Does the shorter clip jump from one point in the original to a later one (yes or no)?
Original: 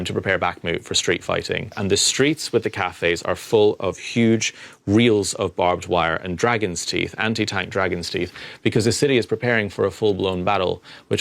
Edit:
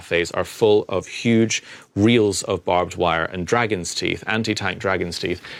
no